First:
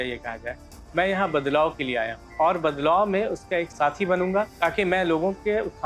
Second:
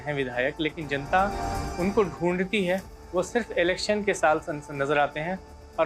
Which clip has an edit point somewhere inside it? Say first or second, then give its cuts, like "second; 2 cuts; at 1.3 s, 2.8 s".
first; 3 cuts; at 2.2 s, 3.7 s, 4.5 s